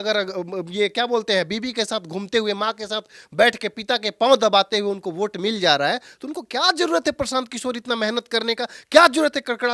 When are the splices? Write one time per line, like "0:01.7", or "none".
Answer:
none